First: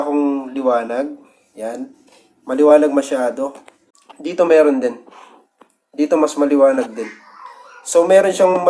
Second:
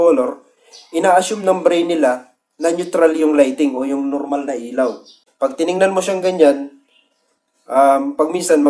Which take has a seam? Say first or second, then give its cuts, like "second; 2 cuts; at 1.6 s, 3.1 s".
second; 1 cut; at 5.2 s